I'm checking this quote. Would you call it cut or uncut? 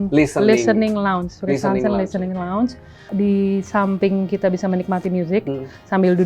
cut